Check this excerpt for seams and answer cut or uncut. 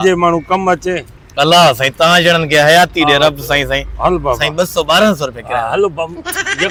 uncut